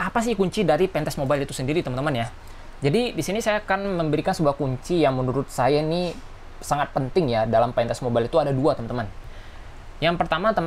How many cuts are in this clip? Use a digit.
0